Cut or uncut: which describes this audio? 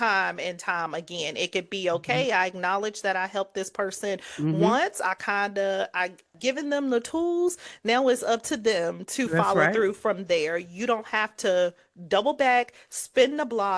cut